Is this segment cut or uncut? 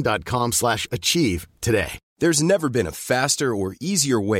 cut